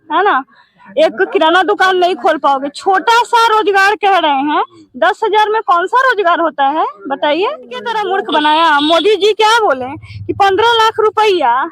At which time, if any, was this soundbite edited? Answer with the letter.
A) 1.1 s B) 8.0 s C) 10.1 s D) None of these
B